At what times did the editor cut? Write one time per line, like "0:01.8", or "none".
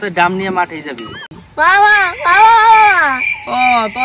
0:01.3